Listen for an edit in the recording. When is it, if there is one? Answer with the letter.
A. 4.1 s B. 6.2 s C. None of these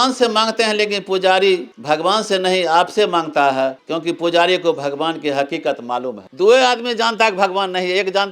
C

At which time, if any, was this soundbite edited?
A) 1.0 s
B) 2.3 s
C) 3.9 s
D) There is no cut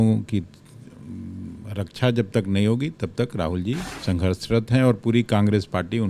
C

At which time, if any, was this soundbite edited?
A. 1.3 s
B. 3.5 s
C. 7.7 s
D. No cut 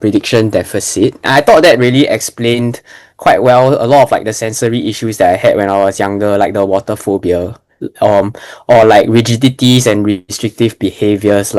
A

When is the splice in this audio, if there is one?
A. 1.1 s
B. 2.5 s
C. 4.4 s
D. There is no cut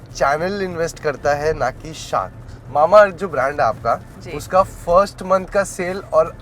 B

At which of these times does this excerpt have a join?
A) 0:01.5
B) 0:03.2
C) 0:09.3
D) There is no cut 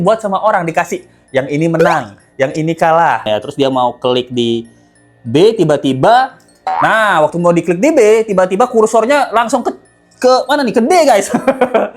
B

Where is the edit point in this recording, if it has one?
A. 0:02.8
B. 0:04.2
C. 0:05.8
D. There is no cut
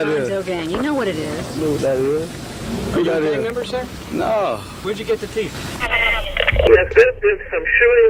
C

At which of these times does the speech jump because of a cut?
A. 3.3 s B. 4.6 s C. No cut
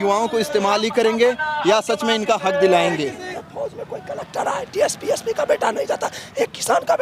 A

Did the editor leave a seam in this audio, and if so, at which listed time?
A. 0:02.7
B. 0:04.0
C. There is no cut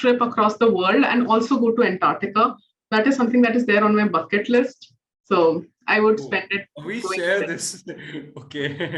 C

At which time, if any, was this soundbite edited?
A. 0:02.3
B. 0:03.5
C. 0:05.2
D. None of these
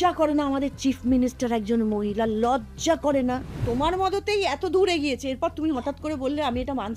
B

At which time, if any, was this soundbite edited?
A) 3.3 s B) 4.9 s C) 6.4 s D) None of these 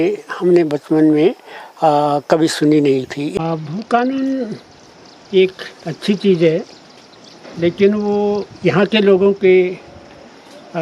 A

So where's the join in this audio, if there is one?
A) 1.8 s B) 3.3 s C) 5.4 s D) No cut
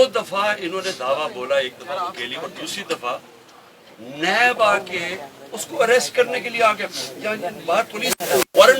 D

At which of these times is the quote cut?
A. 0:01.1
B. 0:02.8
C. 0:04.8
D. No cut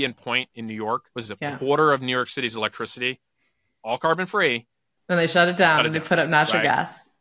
A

